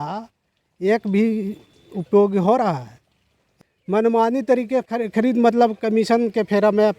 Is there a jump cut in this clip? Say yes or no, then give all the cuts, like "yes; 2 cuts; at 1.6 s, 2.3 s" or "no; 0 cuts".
yes; 1 cut; at 3.5 s